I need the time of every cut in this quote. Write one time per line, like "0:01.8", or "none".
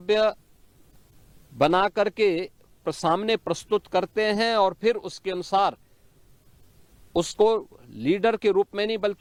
none

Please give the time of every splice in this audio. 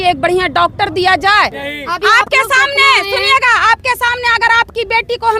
0:01.5

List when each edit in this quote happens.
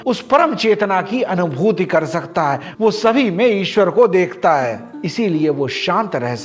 none

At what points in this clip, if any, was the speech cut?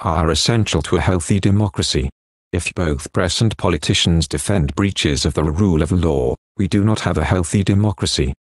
0:07.4

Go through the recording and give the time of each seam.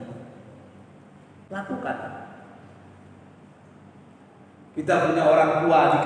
0:01.4

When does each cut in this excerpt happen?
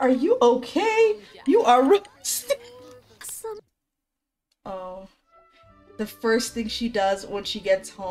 0:03.3

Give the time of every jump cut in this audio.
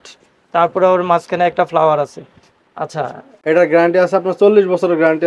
0:03.3

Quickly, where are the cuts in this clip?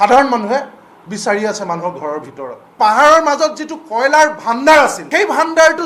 0:02.7
0:05.0

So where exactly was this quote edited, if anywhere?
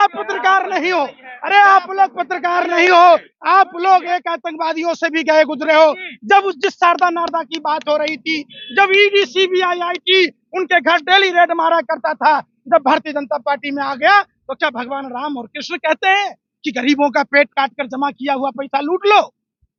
none

